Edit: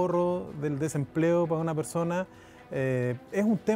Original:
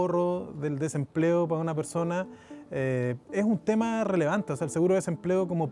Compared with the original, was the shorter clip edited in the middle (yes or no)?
no